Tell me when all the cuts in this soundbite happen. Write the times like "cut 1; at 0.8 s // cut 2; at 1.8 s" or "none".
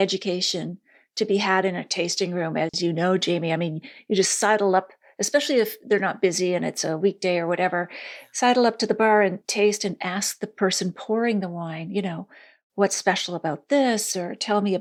none